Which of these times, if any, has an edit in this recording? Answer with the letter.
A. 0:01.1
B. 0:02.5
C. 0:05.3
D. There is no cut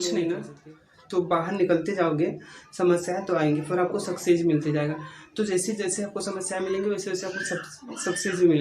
D